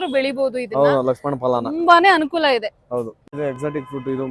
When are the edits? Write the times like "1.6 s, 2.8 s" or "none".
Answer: 3.3 s